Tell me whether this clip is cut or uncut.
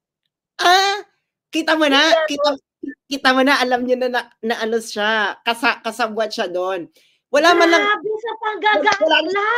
uncut